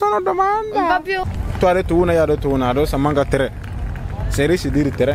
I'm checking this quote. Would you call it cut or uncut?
cut